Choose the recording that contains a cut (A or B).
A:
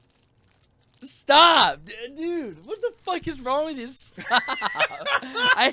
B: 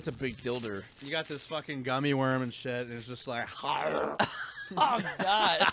B